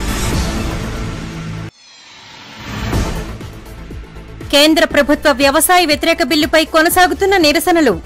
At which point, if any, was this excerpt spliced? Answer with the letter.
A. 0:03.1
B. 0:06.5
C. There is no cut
A